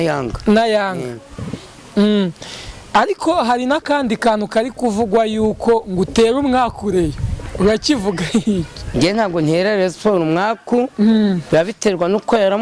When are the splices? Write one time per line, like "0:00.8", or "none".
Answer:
none